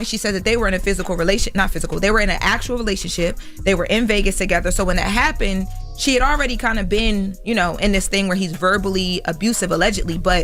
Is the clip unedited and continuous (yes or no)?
yes